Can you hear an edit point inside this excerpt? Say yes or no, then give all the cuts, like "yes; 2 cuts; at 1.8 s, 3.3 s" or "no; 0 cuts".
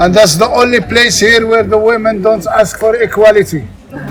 no; 0 cuts